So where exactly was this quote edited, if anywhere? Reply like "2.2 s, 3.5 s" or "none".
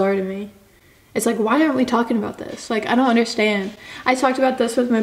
none